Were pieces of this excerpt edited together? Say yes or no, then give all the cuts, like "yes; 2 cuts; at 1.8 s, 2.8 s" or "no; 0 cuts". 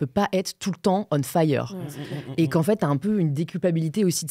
no; 0 cuts